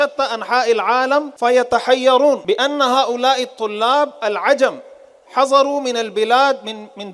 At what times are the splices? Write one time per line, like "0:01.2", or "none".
0:01.3
0:02.4